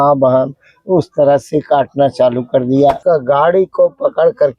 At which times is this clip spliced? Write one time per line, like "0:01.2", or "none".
0:03.0